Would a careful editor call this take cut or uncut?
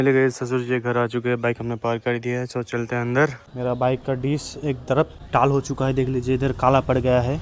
cut